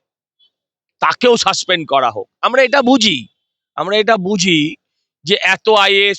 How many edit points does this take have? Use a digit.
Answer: 0